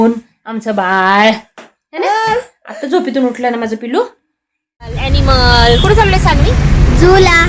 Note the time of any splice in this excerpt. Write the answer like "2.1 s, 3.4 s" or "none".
5.0 s